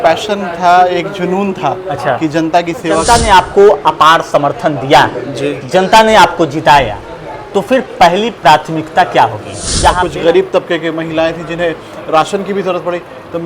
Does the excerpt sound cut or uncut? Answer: cut